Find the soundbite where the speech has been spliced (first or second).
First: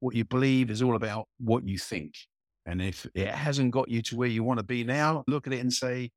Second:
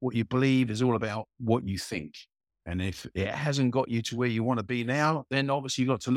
first